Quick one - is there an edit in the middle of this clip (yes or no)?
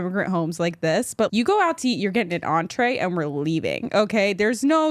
yes